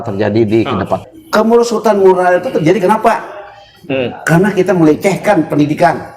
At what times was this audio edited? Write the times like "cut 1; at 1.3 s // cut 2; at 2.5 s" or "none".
cut 1; at 1.1 s